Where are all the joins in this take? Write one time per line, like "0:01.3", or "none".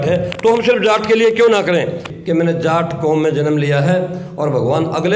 0:02.0